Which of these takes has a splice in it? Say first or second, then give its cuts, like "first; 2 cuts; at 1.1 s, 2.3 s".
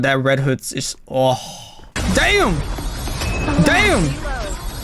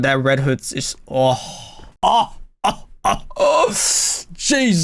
first; 1 cut; at 1.9 s